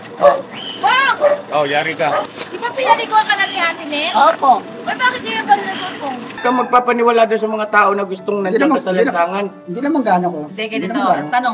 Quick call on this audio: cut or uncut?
cut